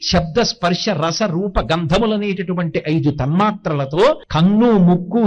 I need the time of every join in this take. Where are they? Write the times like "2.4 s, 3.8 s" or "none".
4.3 s